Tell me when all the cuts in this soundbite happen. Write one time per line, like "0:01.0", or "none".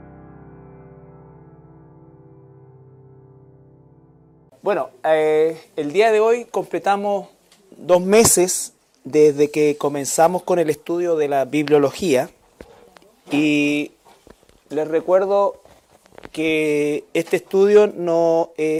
none